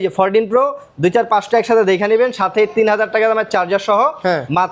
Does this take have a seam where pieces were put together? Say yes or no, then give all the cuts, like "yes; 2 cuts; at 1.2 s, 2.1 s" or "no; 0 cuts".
no; 0 cuts